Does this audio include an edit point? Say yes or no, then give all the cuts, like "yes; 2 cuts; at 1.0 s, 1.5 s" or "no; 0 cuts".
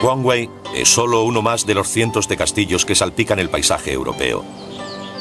yes; 1 cut; at 1.9 s